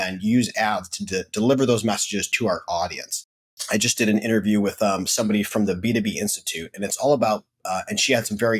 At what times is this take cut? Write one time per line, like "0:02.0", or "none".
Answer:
0:02.3
0:03.6